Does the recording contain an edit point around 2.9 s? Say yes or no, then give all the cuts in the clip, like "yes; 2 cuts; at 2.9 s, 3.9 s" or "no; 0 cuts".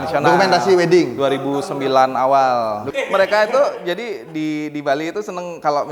yes; 1 cut; at 2.9 s